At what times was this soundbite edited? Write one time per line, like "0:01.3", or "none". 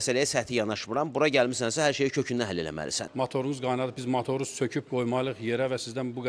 0:03.0